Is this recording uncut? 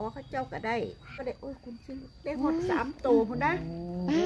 no; 1 cut; at 1.2 s

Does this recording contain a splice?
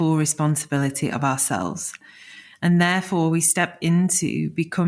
no; 0 cuts

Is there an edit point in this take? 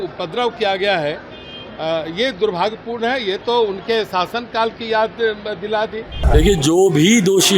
yes; 1 cut; at 6.3 s

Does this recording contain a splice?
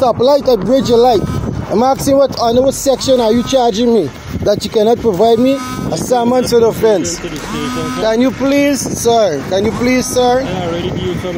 no; 0 cuts

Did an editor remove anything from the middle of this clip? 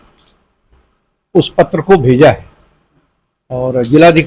no; 0 cuts

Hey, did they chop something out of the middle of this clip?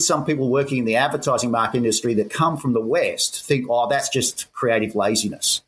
no; 0 cuts

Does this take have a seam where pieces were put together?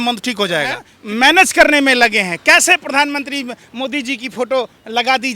yes; 1 cut; at 0.9 s

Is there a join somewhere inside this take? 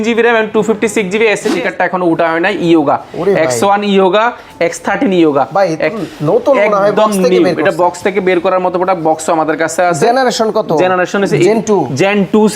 yes; 1 cut; at 1.5 s

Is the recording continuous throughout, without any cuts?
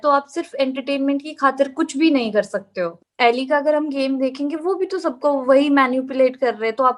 no; 1 cut; at 3.0 s

